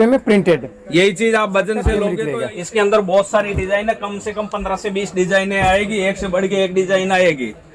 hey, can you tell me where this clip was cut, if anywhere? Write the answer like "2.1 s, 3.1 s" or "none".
2.1 s